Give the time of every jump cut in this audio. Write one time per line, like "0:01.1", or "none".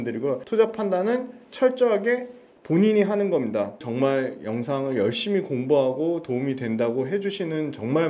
none